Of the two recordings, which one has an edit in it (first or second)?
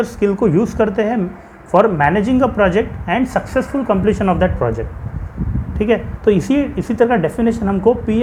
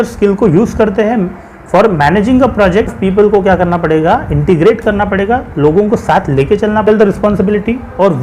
second